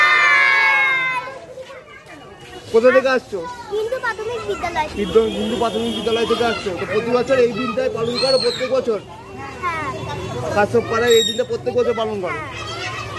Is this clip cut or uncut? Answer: cut